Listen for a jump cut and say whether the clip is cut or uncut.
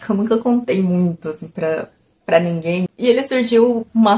cut